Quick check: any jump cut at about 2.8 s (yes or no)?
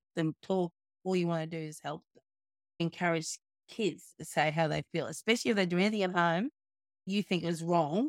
yes